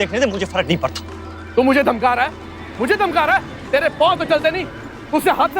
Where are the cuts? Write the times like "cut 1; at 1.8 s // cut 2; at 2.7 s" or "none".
cut 1; at 1.4 s